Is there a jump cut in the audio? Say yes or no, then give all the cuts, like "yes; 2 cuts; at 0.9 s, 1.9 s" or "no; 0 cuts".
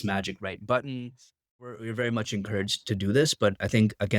yes; 1 cut; at 1.7 s